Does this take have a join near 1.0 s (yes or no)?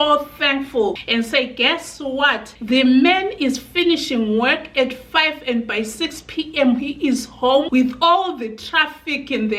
yes